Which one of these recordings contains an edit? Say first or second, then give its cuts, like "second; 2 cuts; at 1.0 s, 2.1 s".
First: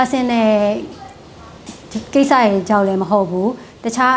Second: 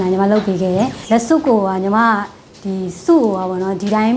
second; 1 cut; at 1.0 s